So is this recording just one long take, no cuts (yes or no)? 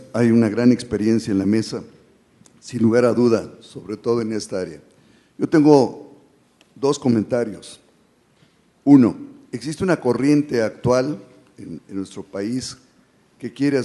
yes